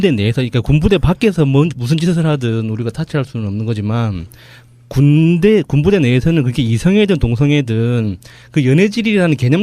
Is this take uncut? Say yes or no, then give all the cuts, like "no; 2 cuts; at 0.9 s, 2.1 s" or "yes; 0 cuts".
no; 1 cut; at 2.3 s